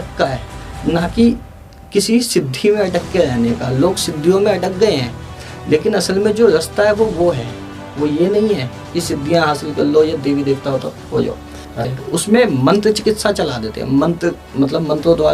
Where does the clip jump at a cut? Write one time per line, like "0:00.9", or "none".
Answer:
0:11.9

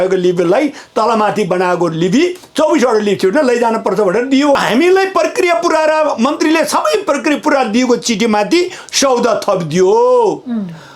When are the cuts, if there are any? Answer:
0:04.6

